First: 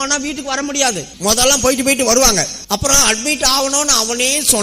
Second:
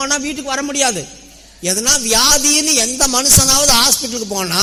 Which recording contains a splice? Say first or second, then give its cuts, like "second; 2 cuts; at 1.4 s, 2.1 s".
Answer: first; 2 cuts; at 1.1 s, 2.6 s